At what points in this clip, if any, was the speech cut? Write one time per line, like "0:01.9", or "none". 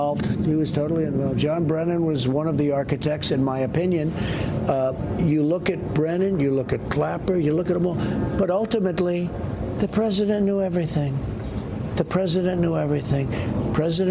none